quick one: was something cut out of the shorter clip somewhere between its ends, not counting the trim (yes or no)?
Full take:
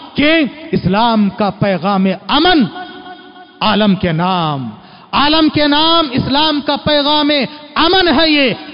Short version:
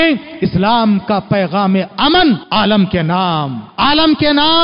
yes